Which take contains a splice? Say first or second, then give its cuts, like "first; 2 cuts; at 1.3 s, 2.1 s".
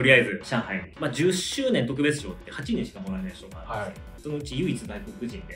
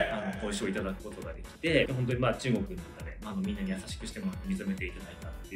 first; 1 cut; at 1.1 s